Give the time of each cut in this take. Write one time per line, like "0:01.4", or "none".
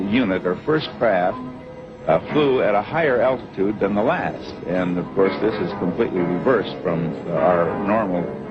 0:05.7